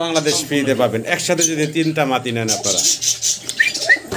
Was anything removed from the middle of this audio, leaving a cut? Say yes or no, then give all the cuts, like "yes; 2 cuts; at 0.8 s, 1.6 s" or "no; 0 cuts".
no; 0 cuts